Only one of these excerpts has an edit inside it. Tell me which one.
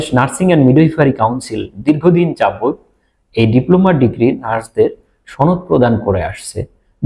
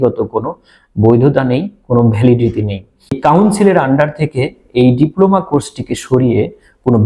second; 1 cut; at 3.2 s

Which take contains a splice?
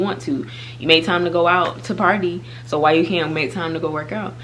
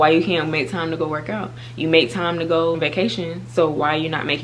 second; 1 cut; at 2.8 s

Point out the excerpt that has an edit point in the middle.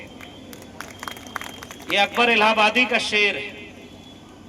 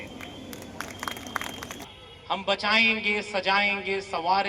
second; 1 cut; at 1.7 s

